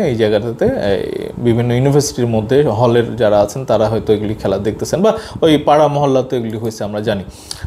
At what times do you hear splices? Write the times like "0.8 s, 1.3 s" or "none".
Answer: none